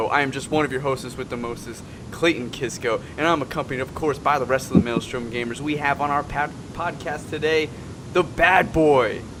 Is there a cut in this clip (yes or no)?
no